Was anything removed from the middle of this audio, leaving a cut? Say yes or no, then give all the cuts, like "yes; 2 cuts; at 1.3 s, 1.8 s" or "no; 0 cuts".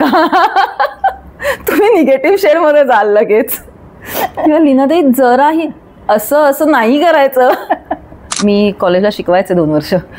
yes; 1 cut; at 8.2 s